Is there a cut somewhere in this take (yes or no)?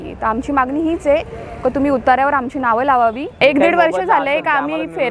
yes